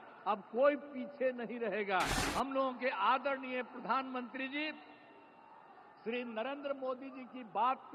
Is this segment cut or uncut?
cut